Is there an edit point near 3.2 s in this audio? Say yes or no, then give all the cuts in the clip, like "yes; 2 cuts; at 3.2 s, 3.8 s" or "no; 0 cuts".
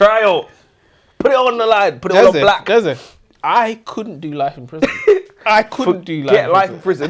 no; 0 cuts